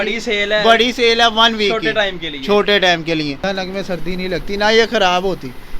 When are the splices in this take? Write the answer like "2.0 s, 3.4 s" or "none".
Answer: 3.4 s